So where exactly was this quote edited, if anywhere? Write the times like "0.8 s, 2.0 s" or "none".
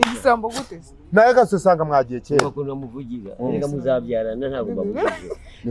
none